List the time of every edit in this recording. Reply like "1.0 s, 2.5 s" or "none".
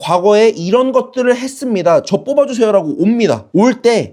none